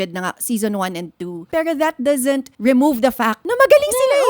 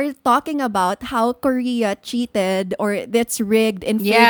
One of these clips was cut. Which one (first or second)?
first